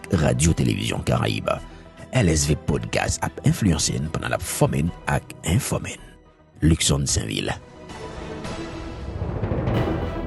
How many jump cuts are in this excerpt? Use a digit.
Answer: 1